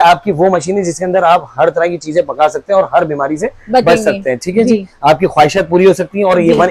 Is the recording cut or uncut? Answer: uncut